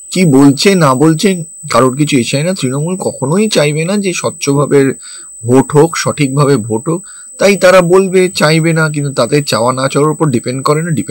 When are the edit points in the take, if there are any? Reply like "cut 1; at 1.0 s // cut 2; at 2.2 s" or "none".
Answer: none